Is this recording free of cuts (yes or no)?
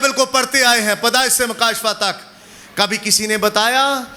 yes